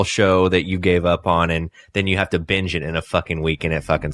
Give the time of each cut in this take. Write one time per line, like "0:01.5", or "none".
none